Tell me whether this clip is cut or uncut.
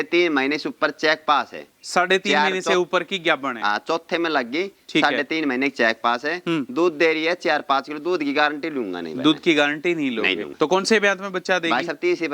cut